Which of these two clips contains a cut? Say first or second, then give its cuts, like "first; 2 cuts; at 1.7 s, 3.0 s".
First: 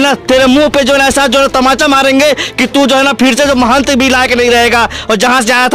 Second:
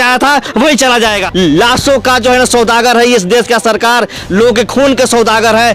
second; 1 cut; at 1.2 s